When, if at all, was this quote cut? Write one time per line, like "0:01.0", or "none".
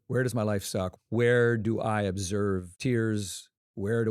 0:00.9
0:02.7